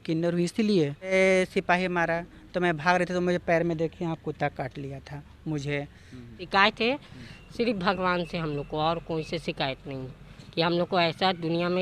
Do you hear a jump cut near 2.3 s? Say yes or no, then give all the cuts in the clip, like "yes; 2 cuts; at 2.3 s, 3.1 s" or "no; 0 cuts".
no; 2 cuts; at 1.1 s, 6.3 s